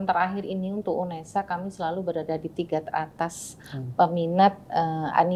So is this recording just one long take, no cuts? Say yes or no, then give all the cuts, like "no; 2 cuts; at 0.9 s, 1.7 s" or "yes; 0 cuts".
yes; 0 cuts